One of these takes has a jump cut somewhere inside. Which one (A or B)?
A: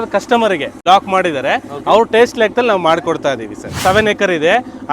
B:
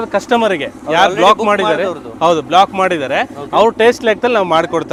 A